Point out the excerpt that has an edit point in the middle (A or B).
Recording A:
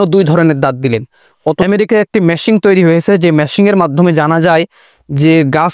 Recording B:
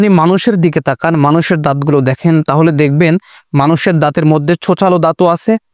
A